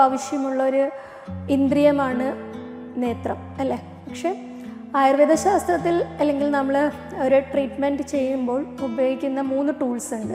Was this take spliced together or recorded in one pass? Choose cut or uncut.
uncut